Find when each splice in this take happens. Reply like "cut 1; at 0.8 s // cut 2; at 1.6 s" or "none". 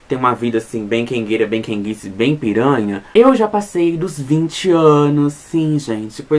cut 1; at 3.0 s